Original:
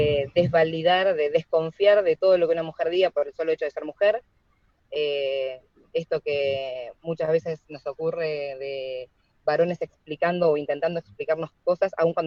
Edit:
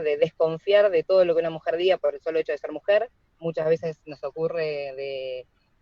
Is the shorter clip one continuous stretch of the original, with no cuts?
no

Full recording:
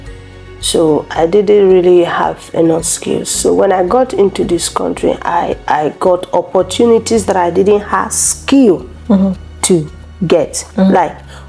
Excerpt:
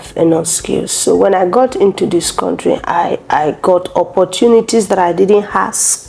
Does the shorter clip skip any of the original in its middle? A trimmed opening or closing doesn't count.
no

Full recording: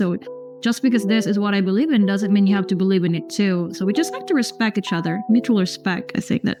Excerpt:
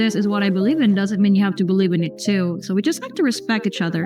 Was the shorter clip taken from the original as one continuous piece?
yes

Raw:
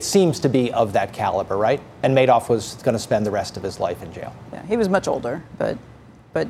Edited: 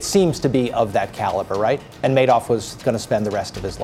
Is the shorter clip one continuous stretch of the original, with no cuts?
yes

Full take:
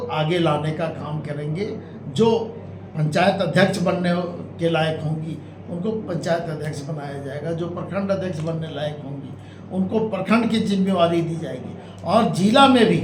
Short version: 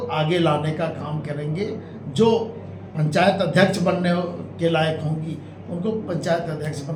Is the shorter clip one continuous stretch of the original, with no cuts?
yes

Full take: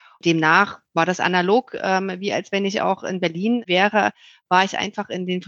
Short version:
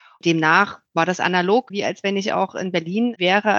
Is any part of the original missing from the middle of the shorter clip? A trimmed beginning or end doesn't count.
yes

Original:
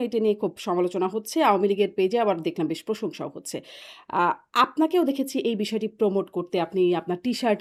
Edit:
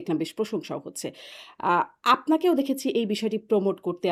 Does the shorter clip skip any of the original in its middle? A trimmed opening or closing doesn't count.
no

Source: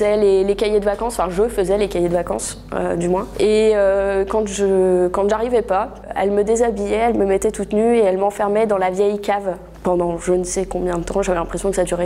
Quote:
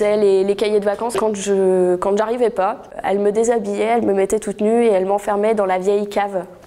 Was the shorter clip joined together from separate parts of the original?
yes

